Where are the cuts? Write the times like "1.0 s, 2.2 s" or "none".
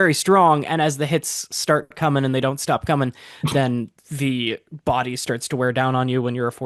none

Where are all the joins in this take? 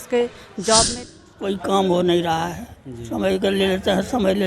1.1 s

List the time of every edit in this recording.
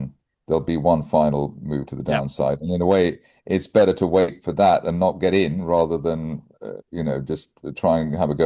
none

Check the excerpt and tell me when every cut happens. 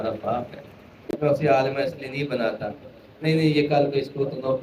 1.0 s

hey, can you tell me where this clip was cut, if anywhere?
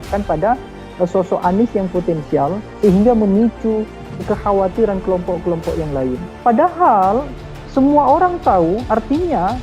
6.3 s

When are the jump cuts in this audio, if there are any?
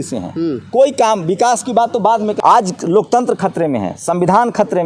2.4 s

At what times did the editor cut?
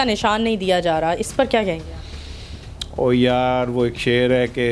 none

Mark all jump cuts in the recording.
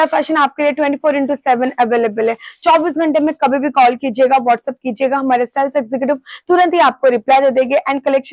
none

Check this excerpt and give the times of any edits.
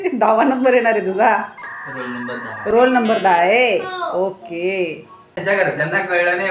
5.4 s

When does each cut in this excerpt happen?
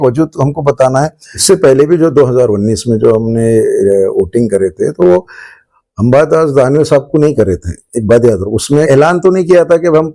1.4 s, 8.9 s

